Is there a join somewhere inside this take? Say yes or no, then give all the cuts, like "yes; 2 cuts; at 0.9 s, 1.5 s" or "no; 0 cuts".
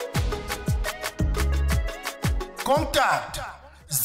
yes; 1 cut; at 2.2 s